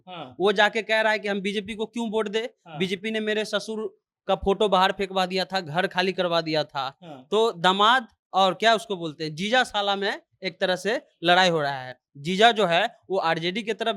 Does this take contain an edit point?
no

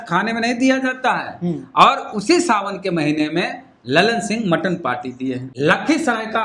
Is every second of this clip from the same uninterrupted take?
no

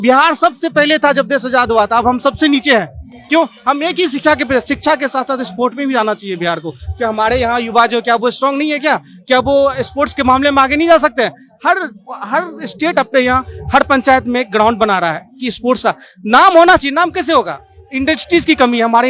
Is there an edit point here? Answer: no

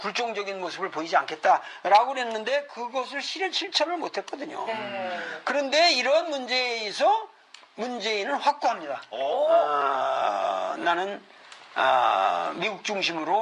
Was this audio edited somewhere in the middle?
yes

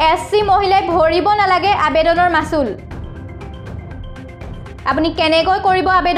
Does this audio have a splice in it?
yes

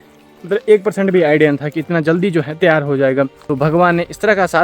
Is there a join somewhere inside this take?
yes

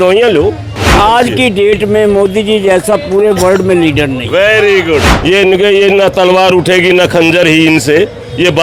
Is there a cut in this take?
yes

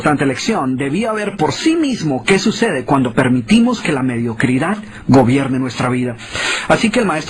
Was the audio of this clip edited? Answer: yes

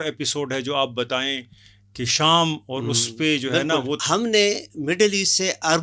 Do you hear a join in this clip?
yes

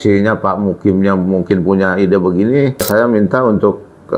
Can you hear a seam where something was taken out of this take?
yes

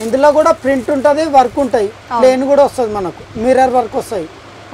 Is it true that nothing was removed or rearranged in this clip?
yes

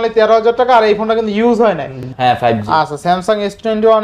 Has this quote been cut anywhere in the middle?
yes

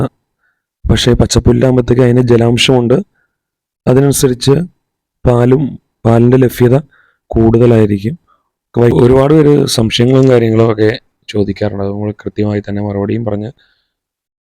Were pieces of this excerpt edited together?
yes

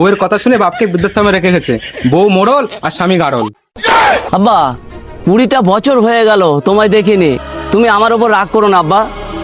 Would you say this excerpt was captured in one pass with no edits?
no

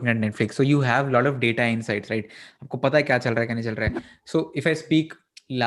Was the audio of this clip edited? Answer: no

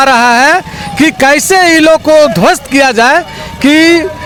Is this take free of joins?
yes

